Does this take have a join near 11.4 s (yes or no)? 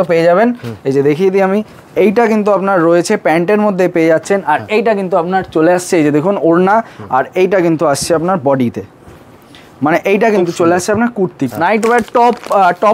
yes